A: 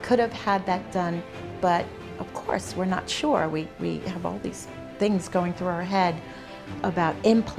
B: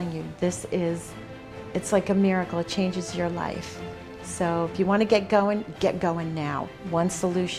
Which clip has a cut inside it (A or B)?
A